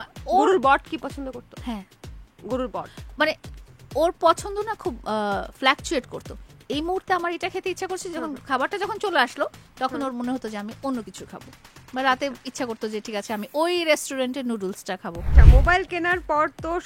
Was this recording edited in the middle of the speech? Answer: yes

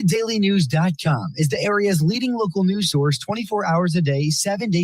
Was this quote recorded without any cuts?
yes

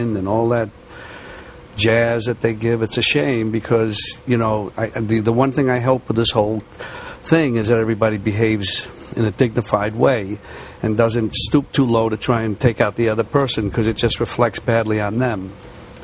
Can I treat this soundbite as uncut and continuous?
no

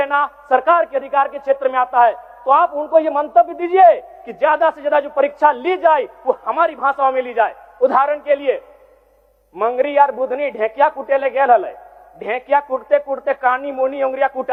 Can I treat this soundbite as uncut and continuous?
yes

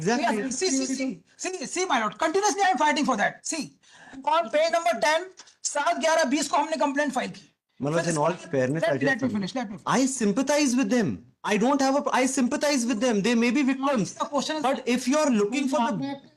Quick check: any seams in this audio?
no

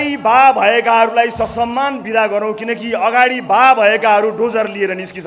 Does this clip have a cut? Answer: no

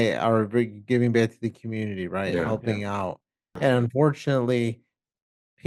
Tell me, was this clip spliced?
yes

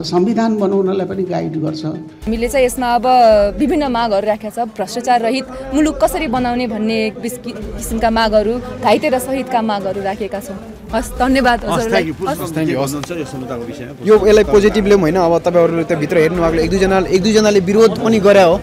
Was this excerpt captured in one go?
no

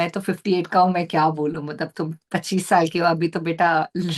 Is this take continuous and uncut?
yes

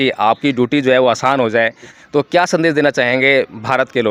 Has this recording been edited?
yes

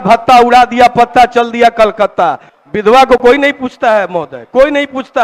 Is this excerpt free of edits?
no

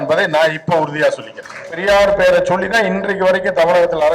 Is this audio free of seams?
no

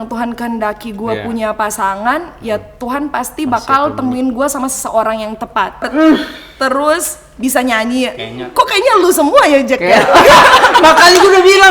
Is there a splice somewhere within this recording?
yes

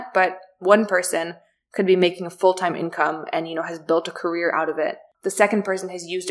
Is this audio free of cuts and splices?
no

